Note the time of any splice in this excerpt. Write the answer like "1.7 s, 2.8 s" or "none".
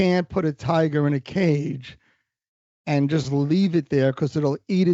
none